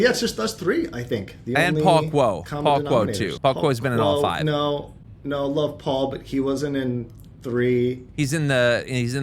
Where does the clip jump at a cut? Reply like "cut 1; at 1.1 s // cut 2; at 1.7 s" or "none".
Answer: cut 1; at 3.3 s // cut 2; at 8.1 s